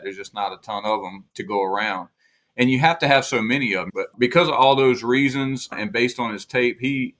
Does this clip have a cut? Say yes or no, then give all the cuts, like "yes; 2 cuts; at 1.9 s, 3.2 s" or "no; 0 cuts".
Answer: yes; 3 cuts; at 1.2 s, 4.1 s, 5.7 s